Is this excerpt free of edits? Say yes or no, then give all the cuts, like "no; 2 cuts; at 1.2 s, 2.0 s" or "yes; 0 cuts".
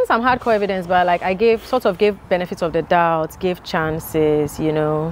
yes; 0 cuts